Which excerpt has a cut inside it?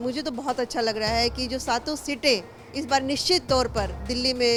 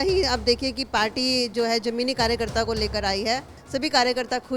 second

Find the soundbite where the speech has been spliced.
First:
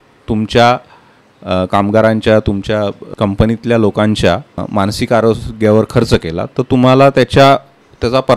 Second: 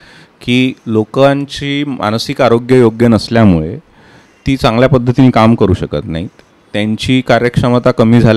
first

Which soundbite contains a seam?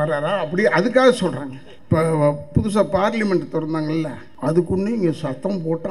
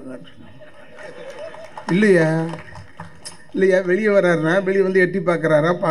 first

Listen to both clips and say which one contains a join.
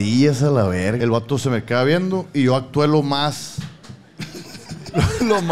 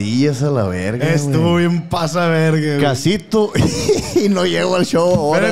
first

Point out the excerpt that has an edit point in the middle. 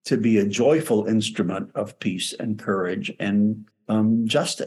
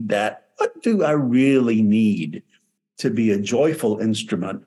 first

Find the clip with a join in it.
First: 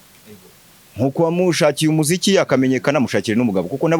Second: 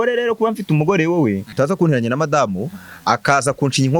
second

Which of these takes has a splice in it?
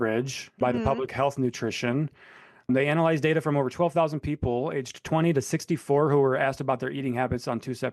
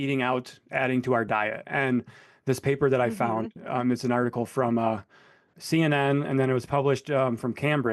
first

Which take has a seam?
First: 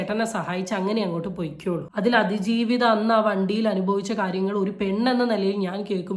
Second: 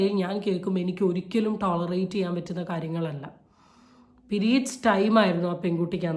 first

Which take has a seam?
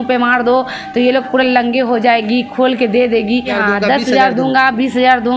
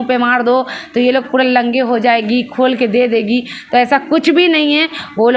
first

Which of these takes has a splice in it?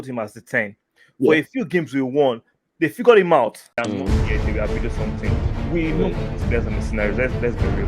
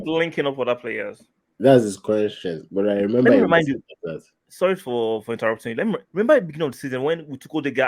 first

